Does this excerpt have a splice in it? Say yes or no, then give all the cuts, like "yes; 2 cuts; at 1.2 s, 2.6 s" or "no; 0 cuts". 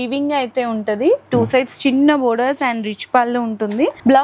no; 0 cuts